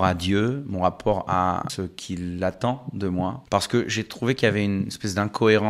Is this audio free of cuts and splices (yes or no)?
no